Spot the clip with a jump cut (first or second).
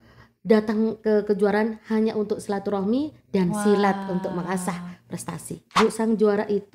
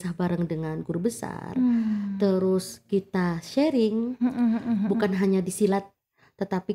first